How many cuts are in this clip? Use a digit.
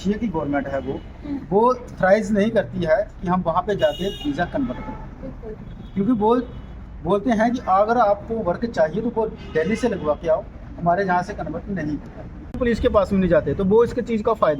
1